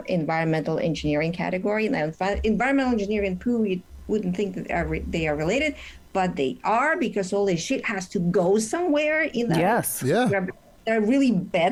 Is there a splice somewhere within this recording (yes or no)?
no